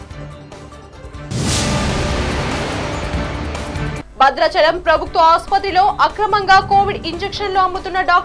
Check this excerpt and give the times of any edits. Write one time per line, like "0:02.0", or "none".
0:01.2
0:04.0